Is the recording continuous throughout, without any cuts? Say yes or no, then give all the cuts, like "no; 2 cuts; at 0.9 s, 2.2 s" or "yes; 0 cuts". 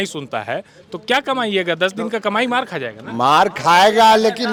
yes; 0 cuts